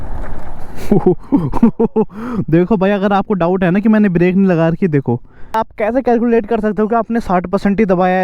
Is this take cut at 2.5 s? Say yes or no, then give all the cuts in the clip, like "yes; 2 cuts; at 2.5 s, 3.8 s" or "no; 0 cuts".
no; 1 cut; at 5.5 s